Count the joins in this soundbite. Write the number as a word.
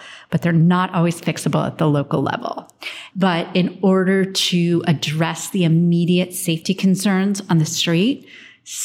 zero